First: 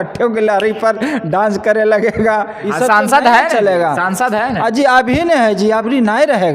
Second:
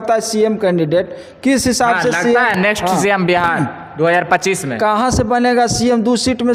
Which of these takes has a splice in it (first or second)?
first